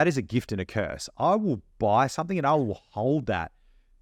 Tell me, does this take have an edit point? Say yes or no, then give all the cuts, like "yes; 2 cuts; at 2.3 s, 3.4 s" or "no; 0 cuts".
no; 0 cuts